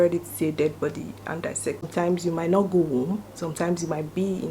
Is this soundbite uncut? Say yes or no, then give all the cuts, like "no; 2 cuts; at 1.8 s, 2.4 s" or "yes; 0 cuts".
no; 1 cut; at 1.9 s